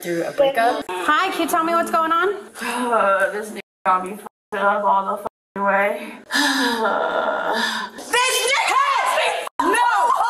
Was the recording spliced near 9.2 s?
no; 3 cuts; at 0.8 s, 2.5 s, 7.9 s

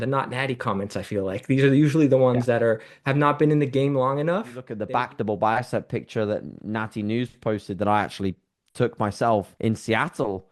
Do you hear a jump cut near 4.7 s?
yes; 1 cut; at 4.7 s

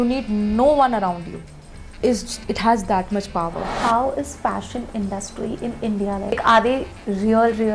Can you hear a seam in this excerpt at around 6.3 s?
yes; 2 cuts; at 3.7 s, 6.3 s

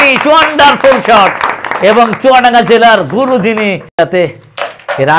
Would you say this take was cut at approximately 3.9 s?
yes; 2 cuts; at 1.1 s, 3.9 s

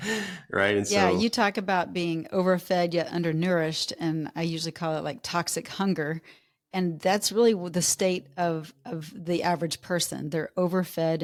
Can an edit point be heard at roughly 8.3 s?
no; 0 cuts

